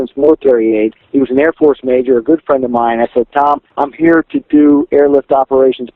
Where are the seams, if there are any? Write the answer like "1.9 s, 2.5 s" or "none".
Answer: 1.0 s, 3.7 s